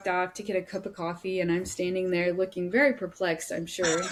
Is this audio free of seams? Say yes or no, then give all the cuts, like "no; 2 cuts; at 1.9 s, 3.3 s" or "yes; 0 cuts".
yes; 0 cuts